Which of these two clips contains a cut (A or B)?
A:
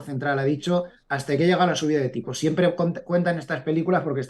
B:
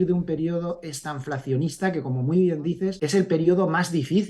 B